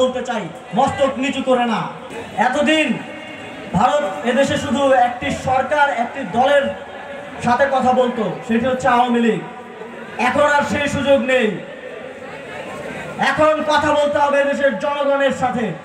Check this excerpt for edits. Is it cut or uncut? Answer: uncut